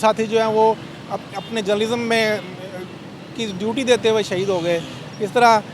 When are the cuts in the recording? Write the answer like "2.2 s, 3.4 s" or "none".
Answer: none